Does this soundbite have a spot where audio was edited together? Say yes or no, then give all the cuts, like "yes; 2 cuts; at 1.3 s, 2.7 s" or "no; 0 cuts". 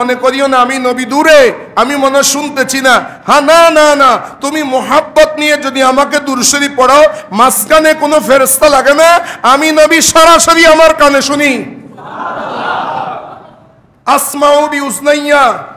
no; 0 cuts